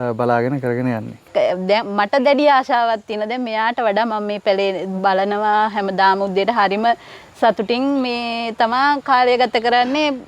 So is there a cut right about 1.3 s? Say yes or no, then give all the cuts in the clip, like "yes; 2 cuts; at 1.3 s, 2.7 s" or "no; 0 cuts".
yes; 1 cut; at 1.3 s